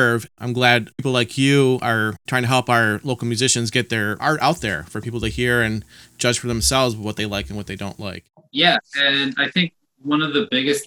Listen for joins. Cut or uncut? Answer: cut